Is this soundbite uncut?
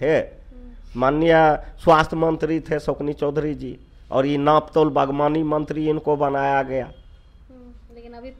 yes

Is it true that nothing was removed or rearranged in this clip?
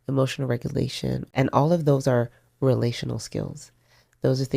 no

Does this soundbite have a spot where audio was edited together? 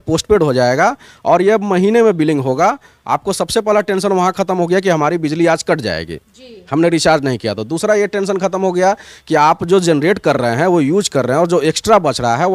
no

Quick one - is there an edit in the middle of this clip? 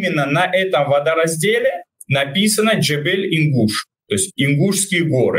yes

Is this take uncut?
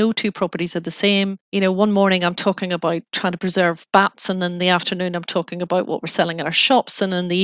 no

